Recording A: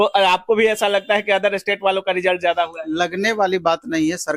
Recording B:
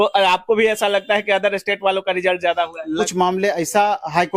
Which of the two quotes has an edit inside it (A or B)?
B